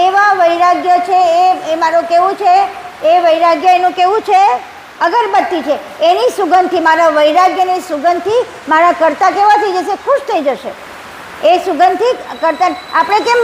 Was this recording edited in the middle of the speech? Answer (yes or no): no